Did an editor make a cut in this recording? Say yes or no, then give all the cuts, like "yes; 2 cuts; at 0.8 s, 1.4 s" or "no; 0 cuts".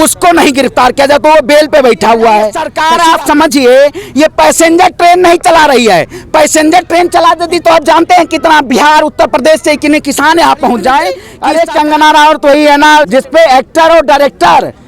yes; 3 cuts; at 2.7 s, 11.3 s, 13.1 s